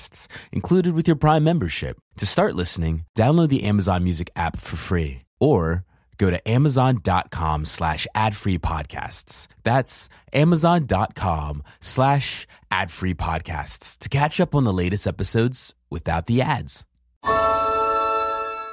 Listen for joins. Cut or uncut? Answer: cut